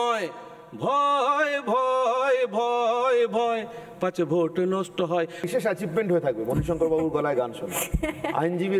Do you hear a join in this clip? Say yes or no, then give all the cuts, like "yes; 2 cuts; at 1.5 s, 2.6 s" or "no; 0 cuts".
yes; 1 cut; at 5.4 s